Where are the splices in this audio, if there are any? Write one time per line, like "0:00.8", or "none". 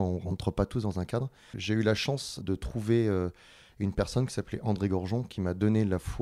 0:01.6
0:02.4